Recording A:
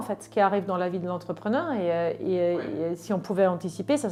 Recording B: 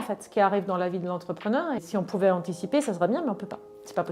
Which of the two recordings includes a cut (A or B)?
B